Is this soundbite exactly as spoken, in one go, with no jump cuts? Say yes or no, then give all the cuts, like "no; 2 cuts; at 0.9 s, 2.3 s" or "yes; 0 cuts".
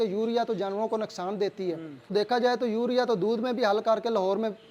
no; 1 cut; at 2.1 s